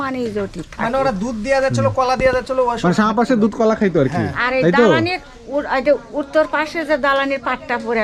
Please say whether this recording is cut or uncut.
uncut